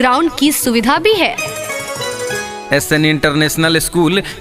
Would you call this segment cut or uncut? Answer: uncut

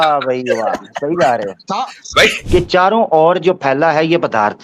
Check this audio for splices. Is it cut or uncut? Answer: cut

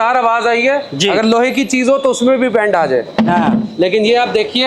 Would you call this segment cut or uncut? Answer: uncut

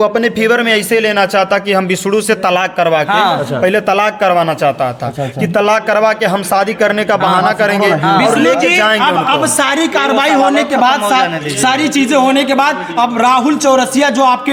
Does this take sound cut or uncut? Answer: uncut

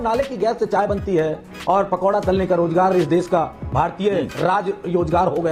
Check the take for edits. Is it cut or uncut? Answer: uncut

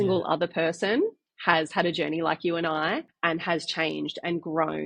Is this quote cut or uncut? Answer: cut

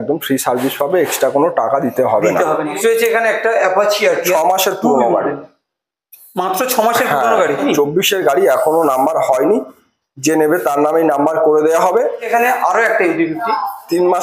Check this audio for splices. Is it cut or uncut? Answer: cut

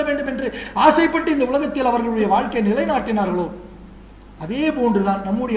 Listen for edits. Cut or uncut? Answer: uncut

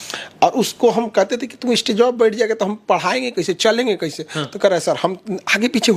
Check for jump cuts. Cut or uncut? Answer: uncut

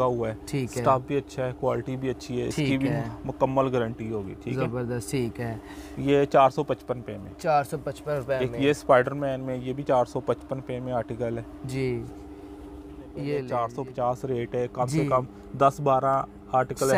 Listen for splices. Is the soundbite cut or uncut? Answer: cut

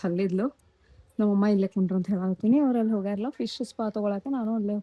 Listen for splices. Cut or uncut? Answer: uncut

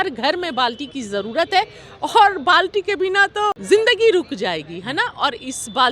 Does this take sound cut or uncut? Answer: cut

